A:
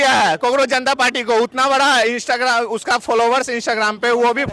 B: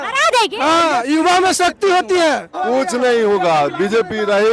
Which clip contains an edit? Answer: B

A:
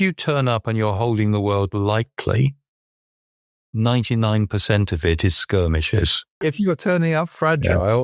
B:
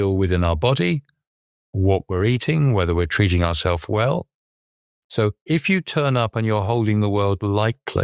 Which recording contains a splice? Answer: A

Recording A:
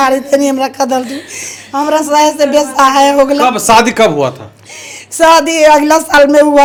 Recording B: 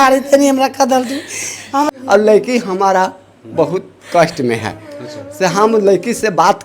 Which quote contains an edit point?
B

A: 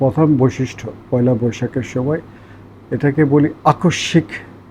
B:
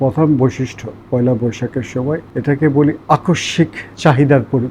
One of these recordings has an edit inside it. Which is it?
B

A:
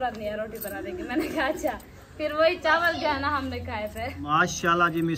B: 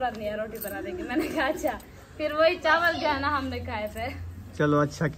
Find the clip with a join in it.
A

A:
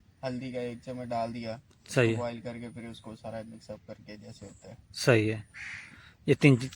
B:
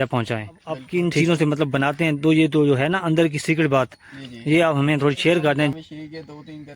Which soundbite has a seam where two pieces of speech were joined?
B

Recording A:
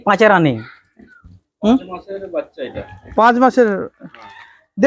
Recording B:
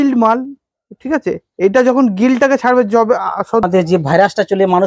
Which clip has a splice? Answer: B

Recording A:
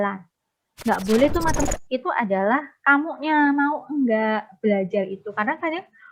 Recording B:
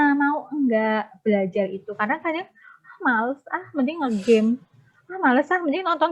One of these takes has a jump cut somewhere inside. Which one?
A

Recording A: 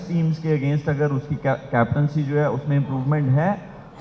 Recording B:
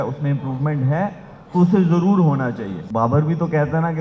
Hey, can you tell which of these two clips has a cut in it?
B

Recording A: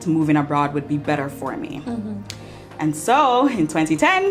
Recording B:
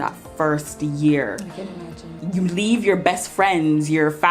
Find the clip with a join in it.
B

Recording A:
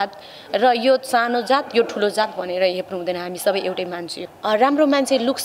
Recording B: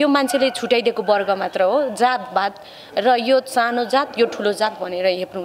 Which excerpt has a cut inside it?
A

